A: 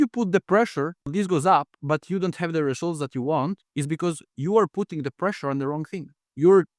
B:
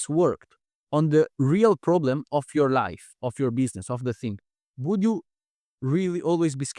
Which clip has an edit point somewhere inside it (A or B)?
A